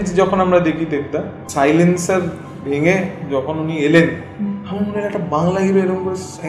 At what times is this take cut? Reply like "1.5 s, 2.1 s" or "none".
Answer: 1.4 s